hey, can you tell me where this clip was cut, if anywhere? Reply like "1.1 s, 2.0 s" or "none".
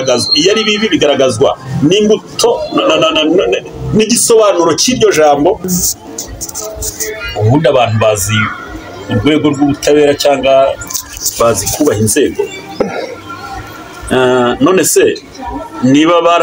5.7 s